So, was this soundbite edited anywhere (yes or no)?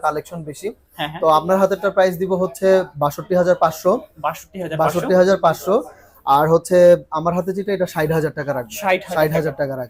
no